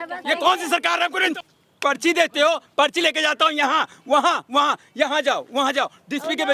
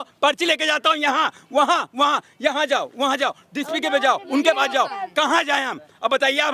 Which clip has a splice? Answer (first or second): first